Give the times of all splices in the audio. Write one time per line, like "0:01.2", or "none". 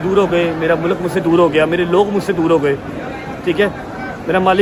none